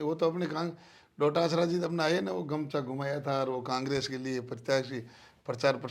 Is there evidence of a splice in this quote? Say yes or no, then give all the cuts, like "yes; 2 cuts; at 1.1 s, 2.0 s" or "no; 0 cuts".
no; 0 cuts